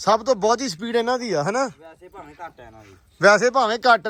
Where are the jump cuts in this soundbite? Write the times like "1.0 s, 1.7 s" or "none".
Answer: none